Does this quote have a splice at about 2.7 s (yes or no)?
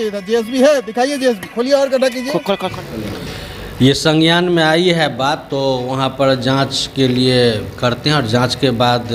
yes